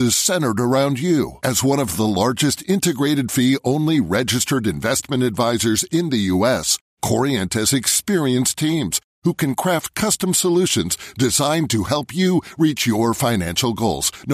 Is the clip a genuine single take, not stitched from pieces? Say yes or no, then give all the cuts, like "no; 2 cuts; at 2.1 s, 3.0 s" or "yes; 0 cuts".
yes; 0 cuts